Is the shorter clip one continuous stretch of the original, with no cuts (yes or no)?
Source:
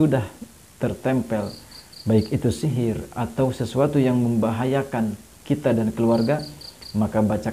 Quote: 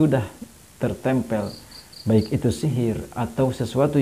yes